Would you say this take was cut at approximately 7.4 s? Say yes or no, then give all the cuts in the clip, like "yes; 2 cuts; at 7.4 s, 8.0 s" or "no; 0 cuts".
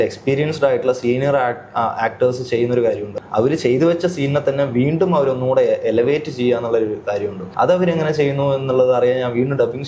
yes; 2 cuts; at 3.1 s, 7.4 s